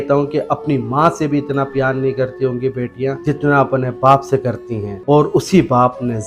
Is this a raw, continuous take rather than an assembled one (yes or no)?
yes